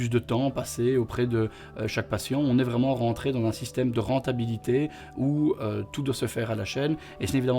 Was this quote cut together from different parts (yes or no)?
no